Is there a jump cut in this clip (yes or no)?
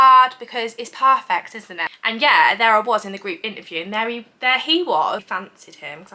yes